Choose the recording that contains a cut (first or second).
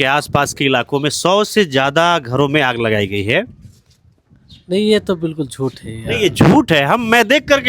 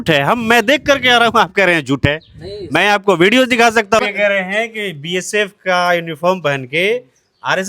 second